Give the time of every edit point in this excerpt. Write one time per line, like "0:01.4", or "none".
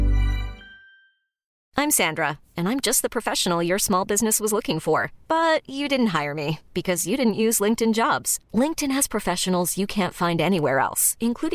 0:01.5